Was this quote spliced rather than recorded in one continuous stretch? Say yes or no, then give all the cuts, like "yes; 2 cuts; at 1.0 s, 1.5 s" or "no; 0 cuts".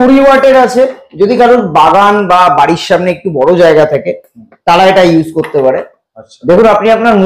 no; 0 cuts